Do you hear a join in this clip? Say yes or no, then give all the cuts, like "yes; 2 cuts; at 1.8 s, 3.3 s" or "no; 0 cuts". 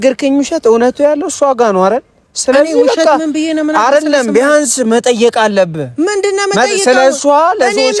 no; 0 cuts